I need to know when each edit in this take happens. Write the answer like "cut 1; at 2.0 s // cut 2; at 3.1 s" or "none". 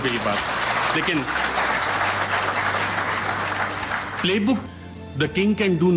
cut 1; at 4.6 s